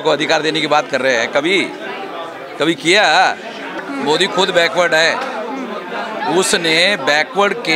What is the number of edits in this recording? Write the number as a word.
one